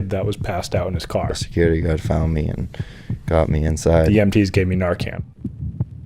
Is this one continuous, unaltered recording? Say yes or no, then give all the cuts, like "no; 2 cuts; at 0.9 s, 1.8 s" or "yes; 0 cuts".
no; 1 cut; at 5.2 s